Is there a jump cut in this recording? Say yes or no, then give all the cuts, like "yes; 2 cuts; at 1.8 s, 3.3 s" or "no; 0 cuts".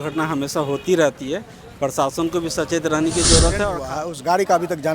yes; 1 cut; at 3.7 s